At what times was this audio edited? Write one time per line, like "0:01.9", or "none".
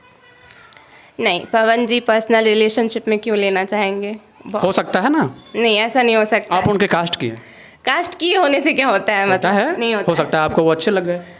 none